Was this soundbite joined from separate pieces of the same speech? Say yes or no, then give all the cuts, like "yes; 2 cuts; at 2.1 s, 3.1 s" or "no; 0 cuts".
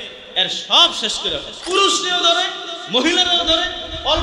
yes; 1 cut; at 1.5 s